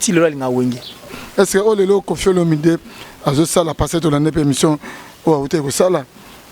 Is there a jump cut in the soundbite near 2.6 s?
no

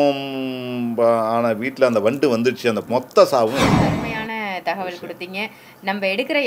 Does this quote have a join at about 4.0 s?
yes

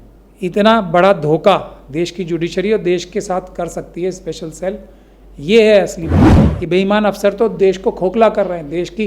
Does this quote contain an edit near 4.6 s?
no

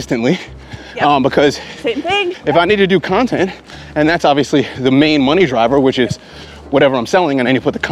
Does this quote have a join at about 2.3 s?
yes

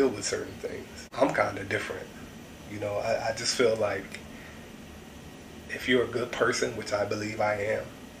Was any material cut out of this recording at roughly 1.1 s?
yes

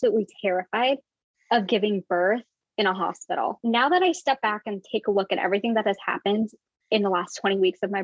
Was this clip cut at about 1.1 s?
no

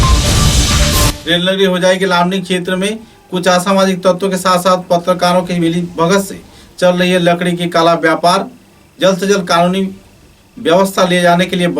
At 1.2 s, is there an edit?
yes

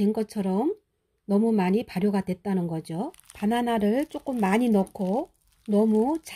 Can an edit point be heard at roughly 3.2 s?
yes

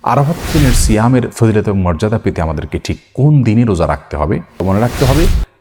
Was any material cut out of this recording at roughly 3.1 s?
no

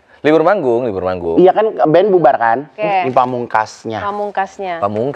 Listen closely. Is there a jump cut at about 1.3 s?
no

